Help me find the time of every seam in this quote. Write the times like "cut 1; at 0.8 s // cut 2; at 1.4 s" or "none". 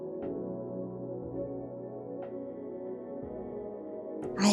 none